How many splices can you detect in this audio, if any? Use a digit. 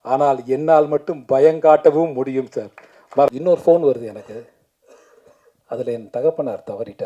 1